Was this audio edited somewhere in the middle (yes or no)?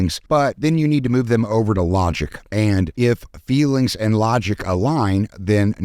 no